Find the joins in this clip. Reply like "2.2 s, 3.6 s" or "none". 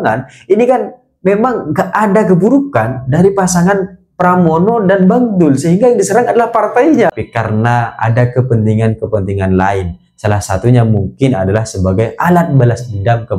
7.1 s